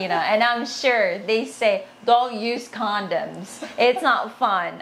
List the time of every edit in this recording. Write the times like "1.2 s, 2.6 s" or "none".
none